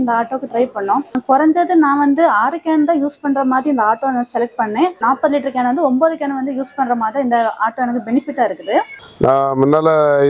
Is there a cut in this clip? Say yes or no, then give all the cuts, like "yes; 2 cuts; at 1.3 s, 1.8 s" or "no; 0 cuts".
yes; 3 cuts; at 1.2 s, 5.0 s, 8.9 s